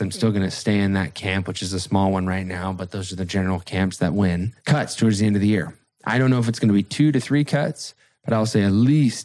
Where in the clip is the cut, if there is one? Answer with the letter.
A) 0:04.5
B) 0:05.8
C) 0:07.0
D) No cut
A